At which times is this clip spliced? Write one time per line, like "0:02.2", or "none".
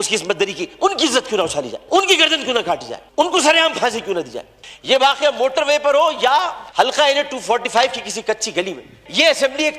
0:01.8
0:03.0
0:04.6
0:08.9